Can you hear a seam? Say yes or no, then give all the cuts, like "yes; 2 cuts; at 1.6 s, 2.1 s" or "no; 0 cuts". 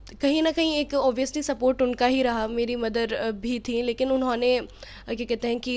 no; 0 cuts